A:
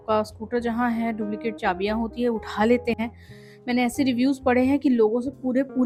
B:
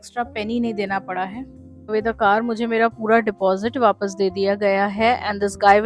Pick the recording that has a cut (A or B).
B